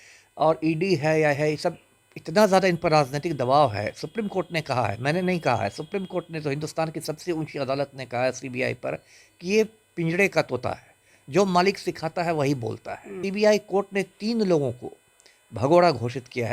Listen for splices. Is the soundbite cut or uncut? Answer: cut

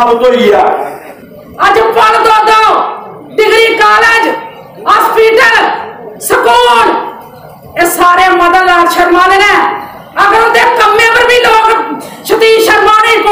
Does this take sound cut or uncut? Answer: cut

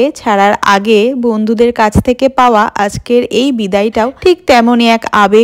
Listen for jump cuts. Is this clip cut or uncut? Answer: uncut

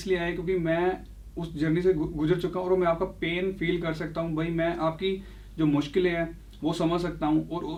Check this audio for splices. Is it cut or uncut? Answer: uncut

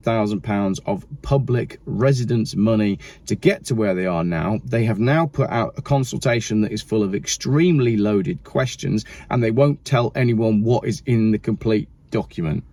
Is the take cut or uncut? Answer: uncut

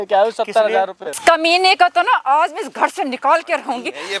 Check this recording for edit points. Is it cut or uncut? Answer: cut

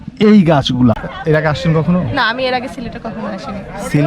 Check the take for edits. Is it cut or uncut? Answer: cut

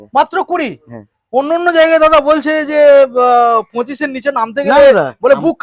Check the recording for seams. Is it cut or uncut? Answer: uncut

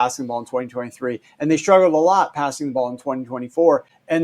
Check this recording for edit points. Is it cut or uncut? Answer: uncut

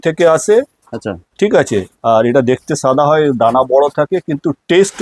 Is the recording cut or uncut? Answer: uncut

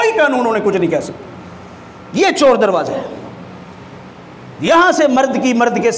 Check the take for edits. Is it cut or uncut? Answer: uncut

